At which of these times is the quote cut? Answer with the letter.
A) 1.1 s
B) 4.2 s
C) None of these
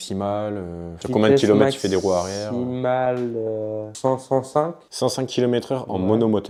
C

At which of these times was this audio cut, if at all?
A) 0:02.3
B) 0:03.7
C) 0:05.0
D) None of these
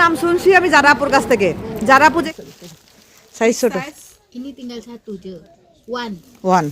A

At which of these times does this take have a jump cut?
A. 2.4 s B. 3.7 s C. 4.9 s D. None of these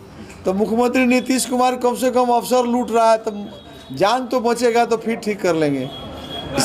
D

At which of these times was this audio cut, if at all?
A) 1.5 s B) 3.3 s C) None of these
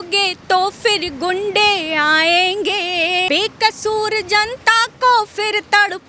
B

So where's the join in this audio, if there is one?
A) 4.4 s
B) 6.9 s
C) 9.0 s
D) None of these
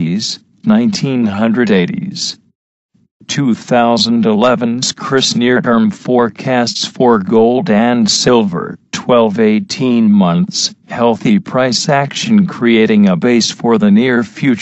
C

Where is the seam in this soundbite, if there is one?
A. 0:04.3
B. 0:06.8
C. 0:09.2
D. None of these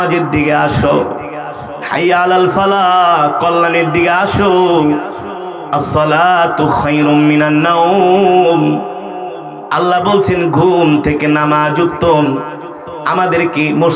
D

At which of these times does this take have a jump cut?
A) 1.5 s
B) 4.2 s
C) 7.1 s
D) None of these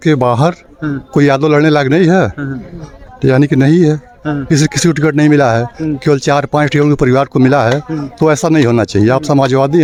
D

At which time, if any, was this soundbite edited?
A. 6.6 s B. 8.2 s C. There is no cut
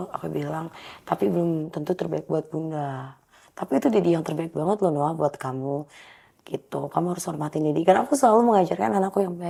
C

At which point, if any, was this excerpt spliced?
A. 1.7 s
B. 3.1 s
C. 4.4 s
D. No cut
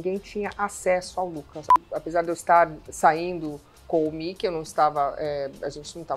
A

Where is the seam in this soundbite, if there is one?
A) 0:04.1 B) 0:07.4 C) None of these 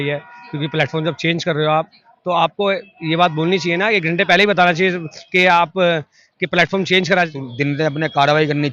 B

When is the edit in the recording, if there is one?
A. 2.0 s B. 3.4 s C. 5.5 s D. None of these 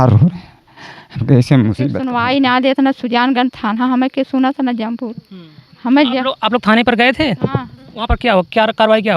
A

